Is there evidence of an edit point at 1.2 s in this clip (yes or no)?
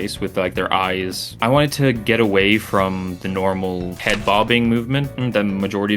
yes